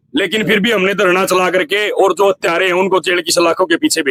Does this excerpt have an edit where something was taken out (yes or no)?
no